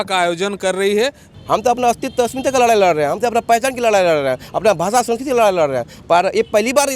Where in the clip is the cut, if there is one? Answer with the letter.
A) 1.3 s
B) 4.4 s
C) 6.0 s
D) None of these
A